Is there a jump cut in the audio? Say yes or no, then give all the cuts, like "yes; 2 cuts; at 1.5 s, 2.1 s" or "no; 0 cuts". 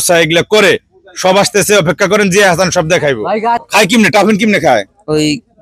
yes; 1 cut; at 3.6 s